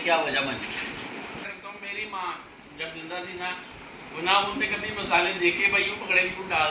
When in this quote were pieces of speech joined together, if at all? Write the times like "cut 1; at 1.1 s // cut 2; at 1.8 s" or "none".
cut 1; at 1.5 s